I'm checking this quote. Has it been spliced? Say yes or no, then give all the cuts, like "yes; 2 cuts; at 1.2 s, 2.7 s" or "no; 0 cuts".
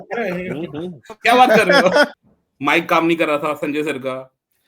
yes; 1 cut; at 2.1 s